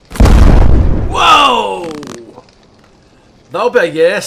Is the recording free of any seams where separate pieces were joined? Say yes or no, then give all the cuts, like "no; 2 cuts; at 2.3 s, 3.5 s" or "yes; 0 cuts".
yes; 0 cuts